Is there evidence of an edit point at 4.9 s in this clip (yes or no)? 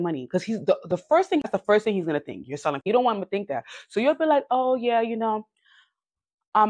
no